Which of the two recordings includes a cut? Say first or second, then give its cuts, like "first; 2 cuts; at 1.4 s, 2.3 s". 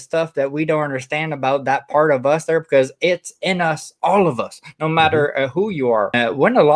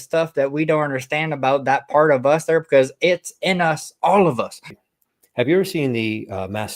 second; 1 cut; at 4.7 s